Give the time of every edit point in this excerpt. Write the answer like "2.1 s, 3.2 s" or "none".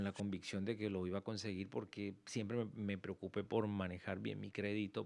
none